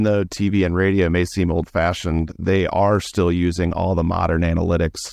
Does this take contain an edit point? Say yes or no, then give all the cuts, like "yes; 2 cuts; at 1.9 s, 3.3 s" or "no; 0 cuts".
no; 0 cuts